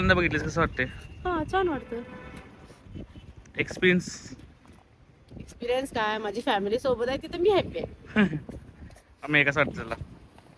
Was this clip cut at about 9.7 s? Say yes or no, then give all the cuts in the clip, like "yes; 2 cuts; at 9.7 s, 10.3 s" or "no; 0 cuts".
no; 0 cuts